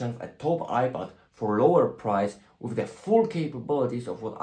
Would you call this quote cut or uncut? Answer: uncut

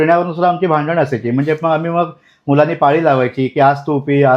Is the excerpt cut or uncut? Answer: uncut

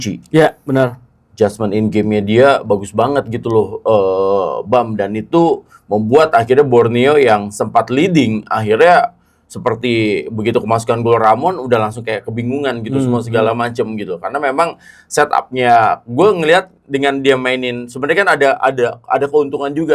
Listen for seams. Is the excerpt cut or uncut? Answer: uncut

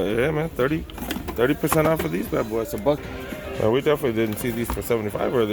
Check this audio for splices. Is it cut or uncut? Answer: cut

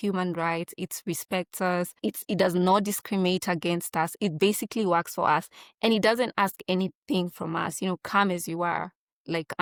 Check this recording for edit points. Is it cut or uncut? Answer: uncut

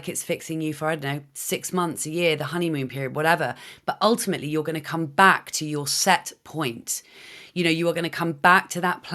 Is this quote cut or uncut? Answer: uncut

